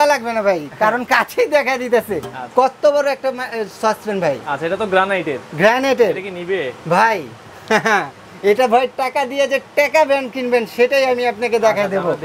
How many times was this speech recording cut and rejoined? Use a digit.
0